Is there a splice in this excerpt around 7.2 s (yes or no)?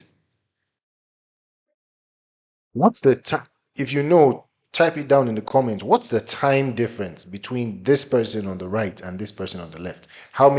no